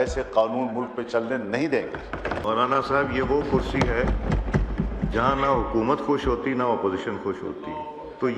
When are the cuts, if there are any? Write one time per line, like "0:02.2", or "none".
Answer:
0:02.4